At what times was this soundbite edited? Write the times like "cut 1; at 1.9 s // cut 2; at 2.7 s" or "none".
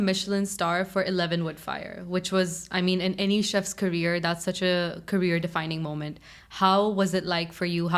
none